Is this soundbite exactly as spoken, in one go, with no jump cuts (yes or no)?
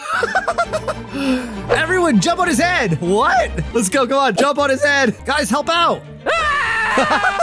no